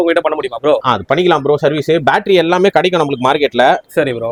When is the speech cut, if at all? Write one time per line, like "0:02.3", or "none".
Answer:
none

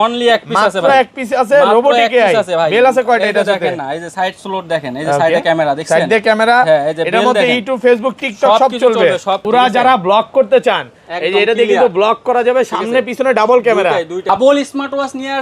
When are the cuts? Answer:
0:09.4
0:14.2

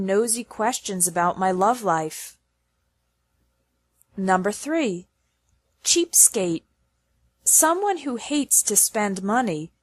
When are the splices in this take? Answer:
0:07.6

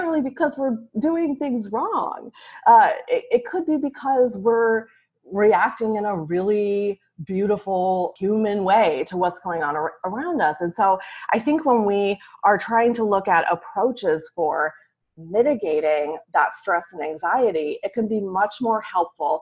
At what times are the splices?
0:08.1

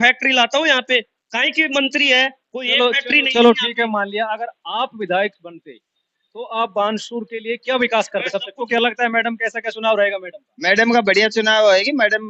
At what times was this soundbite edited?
0:08.6

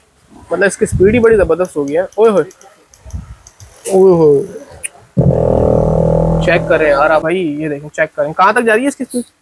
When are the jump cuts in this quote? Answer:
0:07.2

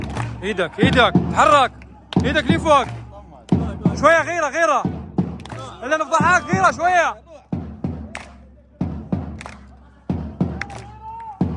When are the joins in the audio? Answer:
none

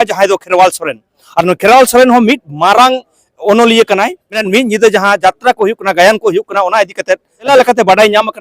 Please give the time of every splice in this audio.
0:04.3
0:07.5

